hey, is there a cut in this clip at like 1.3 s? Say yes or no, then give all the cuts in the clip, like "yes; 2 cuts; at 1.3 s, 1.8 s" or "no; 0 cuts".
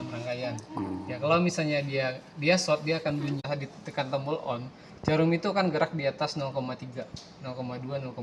no; 1 cut; at 3.5 s